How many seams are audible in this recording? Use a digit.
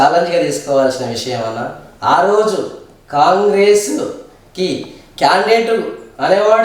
0